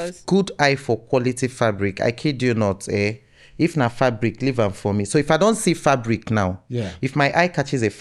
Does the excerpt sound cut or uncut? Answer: uncut